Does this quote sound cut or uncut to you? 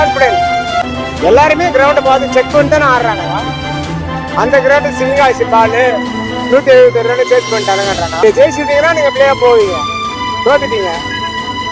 cut